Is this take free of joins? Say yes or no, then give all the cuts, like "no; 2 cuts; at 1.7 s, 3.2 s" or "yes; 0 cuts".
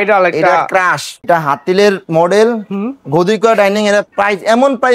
no; 1 cut; at 1.2 s